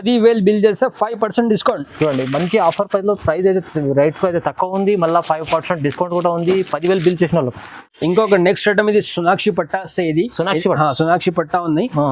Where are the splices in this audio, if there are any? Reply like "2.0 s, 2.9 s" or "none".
none